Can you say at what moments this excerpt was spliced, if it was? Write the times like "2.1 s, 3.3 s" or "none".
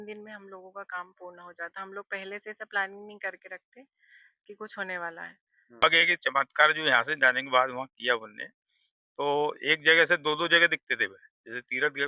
5.8 s